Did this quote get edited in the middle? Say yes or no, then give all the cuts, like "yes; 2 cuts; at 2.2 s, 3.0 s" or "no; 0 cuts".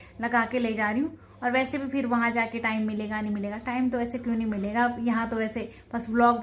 no; 0 cuts